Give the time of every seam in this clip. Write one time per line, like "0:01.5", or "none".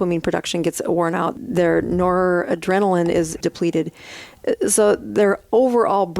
0:01.3
0:03.4